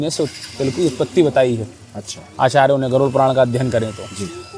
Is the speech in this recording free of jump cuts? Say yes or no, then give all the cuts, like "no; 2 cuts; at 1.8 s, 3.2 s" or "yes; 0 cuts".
yes; 0 cuts